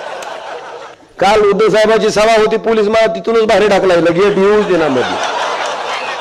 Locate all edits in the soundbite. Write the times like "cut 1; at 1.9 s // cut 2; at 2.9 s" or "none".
cut 1; at 1.0 s